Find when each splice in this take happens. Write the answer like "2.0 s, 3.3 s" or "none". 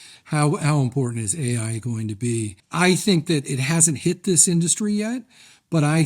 2.6 s